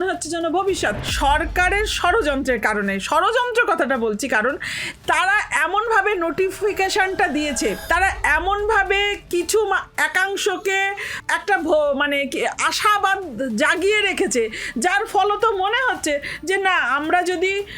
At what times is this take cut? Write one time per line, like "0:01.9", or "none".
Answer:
0:01.0
0:07.8
0:11.1